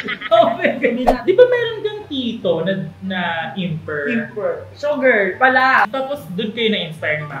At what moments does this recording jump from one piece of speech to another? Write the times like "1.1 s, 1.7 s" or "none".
1.2 s, 5.9 s